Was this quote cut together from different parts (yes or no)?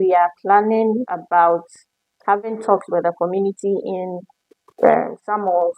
yes